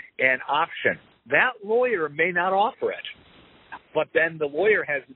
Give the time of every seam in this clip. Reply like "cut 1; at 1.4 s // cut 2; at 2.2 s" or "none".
cut 1; at 1.2 s

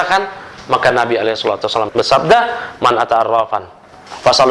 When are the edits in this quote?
none

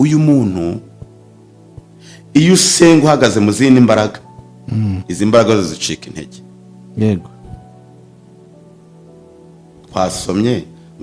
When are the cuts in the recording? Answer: none

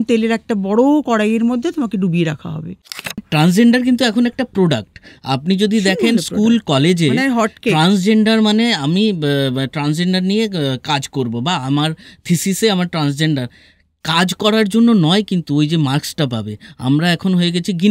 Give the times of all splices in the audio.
cut 1; at 3.2 s

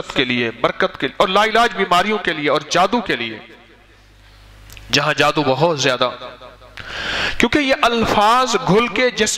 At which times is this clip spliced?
none

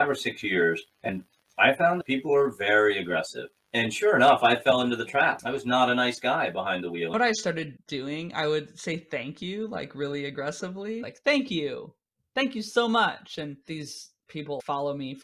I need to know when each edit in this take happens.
cut 1; at 2.0 s // cut 2; at 7.1 s // cut 3; at 11.1 s

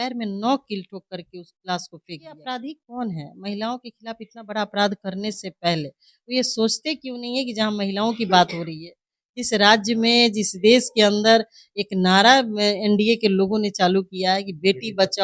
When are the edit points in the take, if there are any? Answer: none

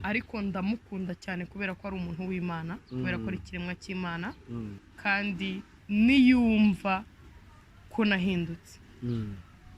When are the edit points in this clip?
cut 1; at 4.8 s // cut 2; at 5.7 s

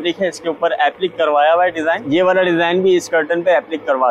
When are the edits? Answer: cut 1; at 2.0 s

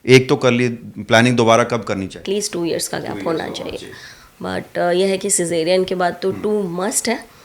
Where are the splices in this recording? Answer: cut 1; at 2.2 s

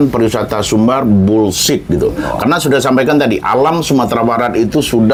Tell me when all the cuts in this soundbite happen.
none

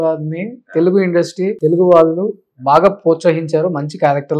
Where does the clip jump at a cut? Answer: cut 1; at 1.5 s

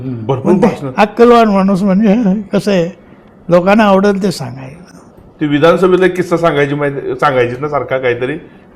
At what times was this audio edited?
none

